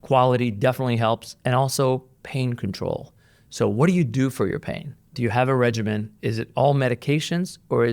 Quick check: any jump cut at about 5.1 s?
yes; 1 cut; at 5.1 s

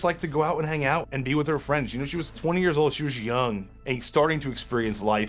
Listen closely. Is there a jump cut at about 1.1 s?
yes; 3 cuts; at 1.1 s, 2.4 s, 3.7 s

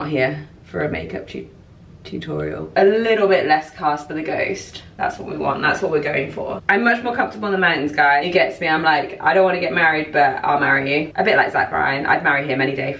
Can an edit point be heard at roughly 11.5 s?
no; 3 cuts; at 2.7 s, 6.6 s, 8.3 s

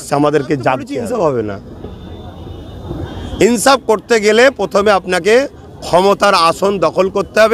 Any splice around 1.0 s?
yes; 1 cut; at 1.0 s

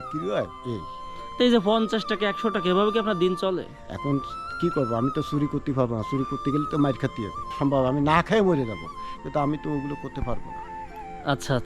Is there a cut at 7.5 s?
yes; 1 cut; at 7.5 s

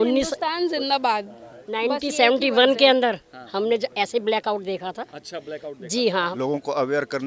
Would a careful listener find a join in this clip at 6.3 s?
yes; 1 cut; at 6.3 s

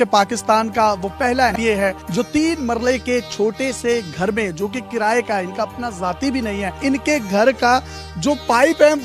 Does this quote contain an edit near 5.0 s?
no; 2 cuts; at 1.6 s, 6.7 s

